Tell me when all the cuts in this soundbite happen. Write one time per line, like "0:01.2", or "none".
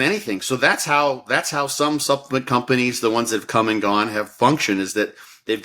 none